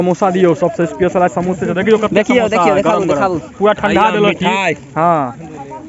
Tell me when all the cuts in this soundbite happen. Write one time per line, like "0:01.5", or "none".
none